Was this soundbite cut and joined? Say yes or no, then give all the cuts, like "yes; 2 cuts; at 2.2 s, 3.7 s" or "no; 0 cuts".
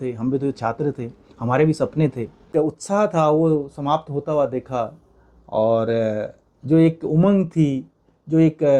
yes; 1 cut; at 2.5 s